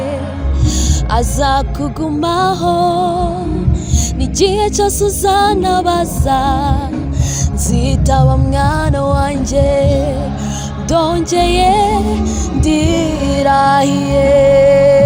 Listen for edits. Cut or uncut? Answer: uncut